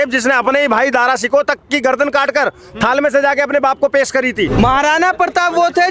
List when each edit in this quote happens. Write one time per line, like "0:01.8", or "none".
0:04.5